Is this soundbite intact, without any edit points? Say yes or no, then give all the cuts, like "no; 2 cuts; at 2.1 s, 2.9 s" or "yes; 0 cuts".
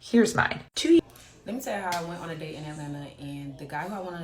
no; 1 cut; at 1.0 s